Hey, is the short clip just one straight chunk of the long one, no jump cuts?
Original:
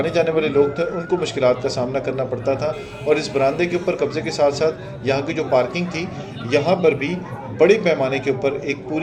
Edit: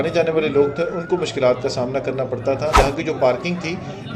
no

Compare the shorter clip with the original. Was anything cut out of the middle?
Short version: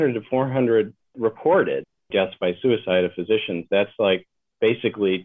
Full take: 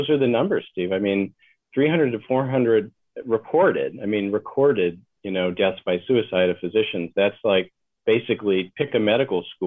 yes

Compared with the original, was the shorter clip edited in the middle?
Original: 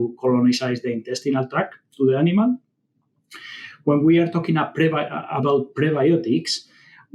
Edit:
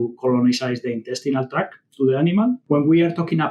yes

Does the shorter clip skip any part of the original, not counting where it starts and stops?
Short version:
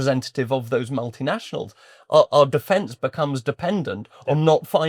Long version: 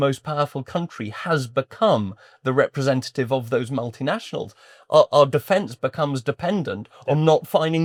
no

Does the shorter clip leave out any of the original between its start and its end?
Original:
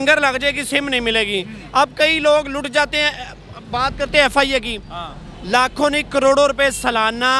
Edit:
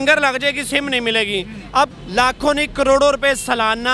yes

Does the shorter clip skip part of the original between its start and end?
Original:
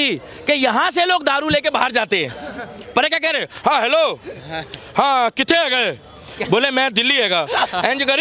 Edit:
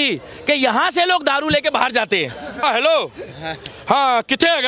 yes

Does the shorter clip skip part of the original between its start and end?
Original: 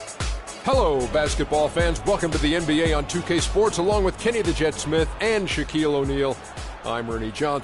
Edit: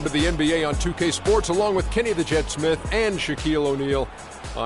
no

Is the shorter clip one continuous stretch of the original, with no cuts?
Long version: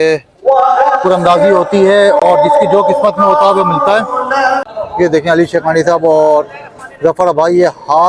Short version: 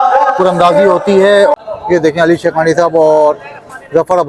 no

